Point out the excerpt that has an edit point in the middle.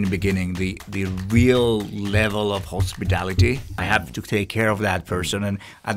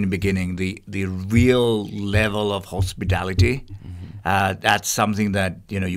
first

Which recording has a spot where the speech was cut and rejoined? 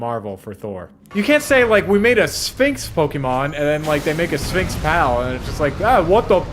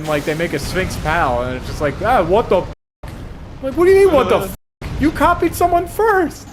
first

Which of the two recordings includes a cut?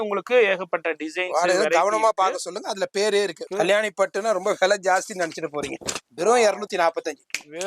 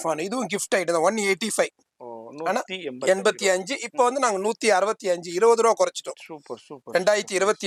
first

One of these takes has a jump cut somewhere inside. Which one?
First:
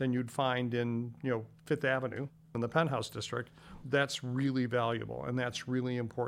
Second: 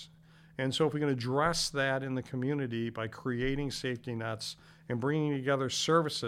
first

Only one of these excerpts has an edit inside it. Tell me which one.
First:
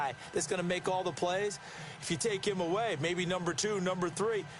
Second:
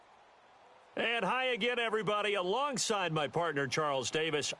second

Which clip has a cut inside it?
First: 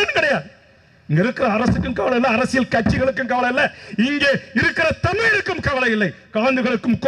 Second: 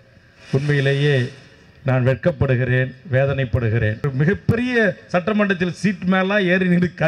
second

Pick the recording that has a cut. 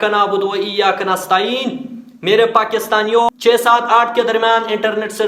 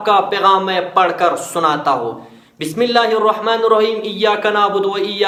first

